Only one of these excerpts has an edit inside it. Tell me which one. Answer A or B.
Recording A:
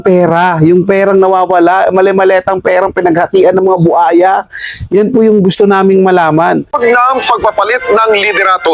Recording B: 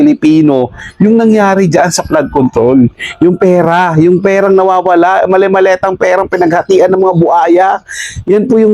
A